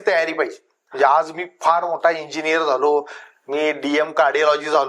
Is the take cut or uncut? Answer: uncut